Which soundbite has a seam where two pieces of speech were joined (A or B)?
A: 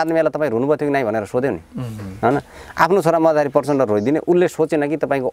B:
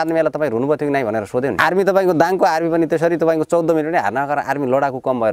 B